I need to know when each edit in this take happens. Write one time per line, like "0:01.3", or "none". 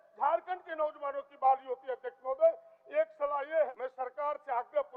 0:03.7

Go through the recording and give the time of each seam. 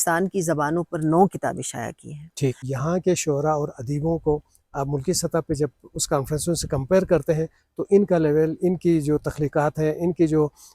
0:02.7

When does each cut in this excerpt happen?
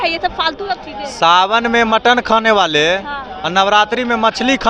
none

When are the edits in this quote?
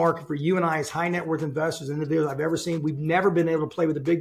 none

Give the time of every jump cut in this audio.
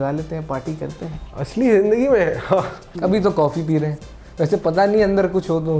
0:01.2
0:03.1

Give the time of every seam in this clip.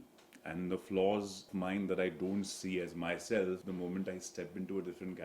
0:01.4
0:03.6

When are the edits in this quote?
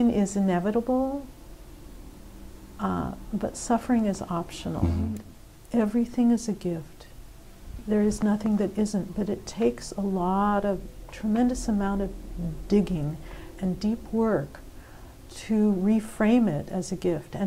0:05.2

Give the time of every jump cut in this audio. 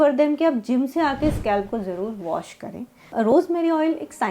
0:03.1

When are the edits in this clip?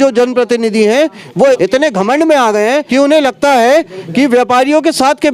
0:01.6
0:02.9

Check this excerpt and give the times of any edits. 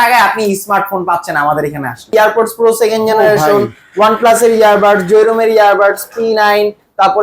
0:02.1

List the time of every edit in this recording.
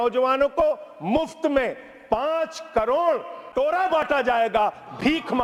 none

